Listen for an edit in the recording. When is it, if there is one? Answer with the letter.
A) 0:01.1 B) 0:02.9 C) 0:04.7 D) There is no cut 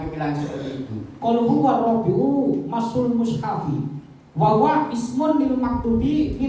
A